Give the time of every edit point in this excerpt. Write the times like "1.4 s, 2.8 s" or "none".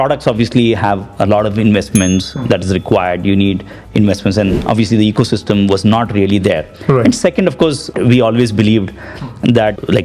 none